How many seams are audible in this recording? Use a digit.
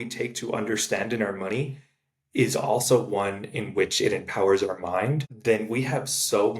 1